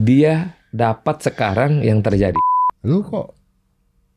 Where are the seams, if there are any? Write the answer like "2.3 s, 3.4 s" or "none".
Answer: 2.3 s